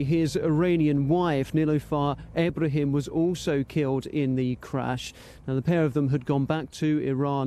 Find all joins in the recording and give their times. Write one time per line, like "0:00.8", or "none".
none